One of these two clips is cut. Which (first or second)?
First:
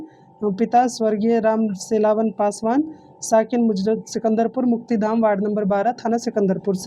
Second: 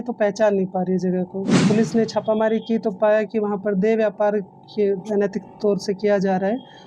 second